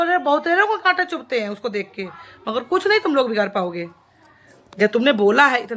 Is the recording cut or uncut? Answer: uncut